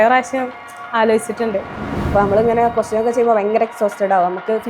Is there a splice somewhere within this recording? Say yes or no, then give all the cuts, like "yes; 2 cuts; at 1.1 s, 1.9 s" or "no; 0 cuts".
yes; 1 cut; at 1.9 s